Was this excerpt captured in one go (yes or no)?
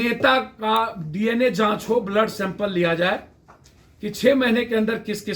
yes